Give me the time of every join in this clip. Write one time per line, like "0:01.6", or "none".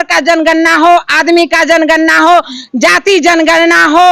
none